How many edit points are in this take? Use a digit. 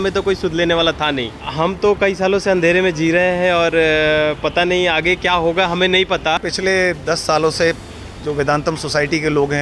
2